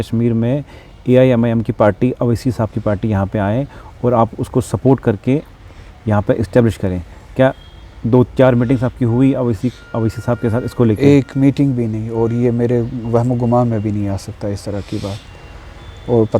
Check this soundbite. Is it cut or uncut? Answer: uncut